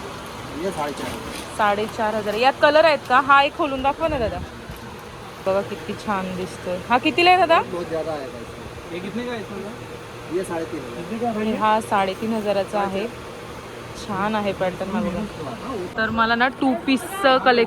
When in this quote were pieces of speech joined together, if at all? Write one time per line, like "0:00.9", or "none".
0:15.9